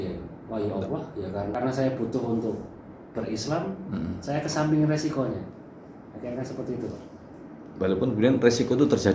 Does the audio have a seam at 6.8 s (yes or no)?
no